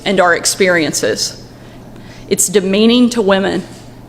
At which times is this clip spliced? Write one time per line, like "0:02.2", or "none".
0:01.7